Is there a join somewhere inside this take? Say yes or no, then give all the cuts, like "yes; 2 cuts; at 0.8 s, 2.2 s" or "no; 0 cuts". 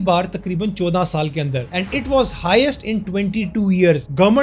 no; 0 cuts